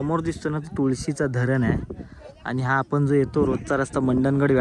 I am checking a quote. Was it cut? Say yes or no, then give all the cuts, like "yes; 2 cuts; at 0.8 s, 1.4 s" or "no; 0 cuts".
no; 0 cuts